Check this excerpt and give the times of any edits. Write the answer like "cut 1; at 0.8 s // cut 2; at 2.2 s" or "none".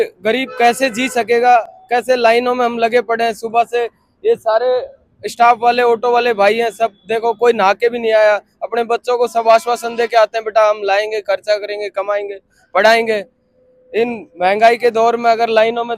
none